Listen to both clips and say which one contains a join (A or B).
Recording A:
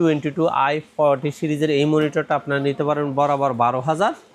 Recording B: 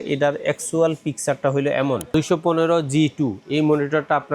B